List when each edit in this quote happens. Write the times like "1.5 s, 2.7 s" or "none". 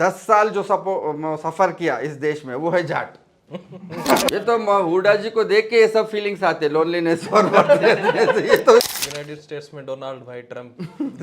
4.3 s, 8.9 s